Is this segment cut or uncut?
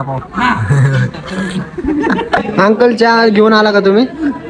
cut